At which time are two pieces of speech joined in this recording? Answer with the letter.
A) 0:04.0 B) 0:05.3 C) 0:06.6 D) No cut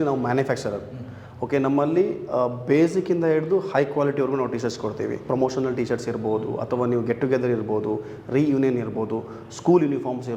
B